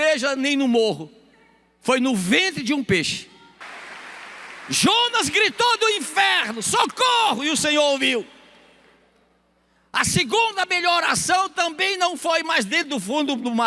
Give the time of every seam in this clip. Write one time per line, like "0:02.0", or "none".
0:03.6